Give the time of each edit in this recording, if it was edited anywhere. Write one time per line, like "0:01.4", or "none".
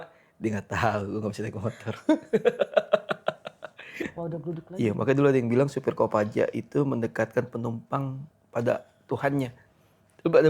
0:04.1